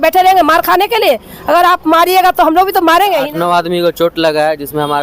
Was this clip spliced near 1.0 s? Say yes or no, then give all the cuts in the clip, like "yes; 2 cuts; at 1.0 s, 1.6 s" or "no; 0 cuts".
no; 1 cut; at 3.3 s